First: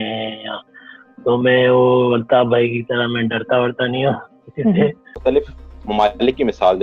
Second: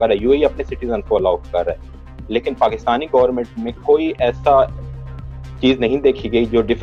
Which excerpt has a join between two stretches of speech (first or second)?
first